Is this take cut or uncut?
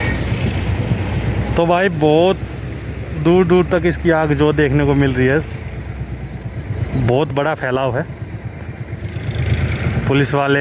uncut